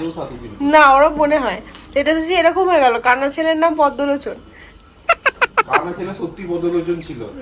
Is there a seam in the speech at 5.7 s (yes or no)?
yes